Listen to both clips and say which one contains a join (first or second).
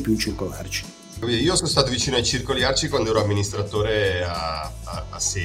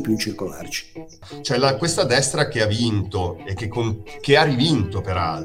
second